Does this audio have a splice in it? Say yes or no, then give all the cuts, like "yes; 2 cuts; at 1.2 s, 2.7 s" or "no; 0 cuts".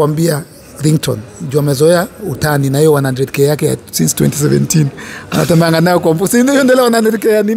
no; 0 cuts